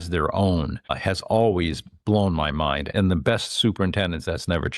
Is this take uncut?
no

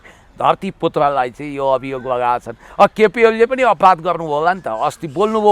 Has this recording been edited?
no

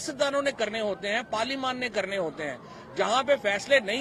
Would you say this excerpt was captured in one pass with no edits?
yes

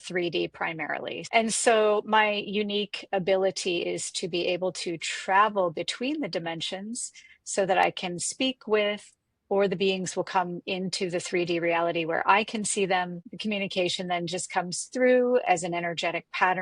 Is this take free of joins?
no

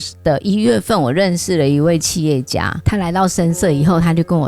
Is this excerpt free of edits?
no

